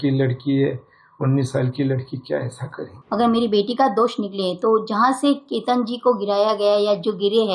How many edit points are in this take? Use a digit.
1